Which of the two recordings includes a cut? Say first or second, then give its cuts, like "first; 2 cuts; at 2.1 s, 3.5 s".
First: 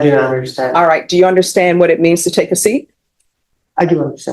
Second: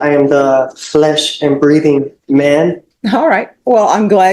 second; 1 cut; at 2.9 s